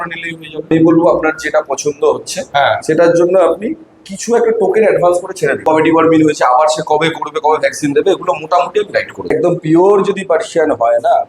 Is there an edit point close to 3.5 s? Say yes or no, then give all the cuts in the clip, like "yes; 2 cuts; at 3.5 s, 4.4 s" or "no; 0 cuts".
no; 3 cuts; at 0.7 s, 5.6 s, 9.3 s